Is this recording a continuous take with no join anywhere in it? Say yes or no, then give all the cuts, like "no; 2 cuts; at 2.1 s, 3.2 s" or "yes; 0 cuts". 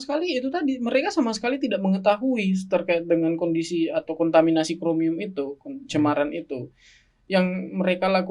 yes; 0 cuts